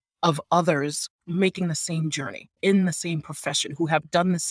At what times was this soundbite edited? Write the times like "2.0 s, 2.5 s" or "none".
1.2 s, 2.6 s